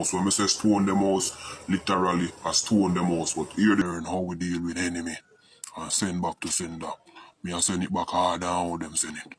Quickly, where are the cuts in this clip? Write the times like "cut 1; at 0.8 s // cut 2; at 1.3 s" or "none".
cut 1; at 3.8 s